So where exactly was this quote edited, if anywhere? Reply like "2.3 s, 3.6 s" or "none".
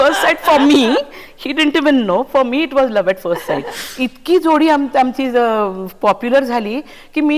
3.8 s